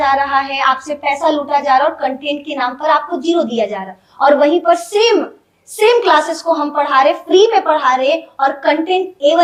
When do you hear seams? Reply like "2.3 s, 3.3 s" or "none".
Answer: none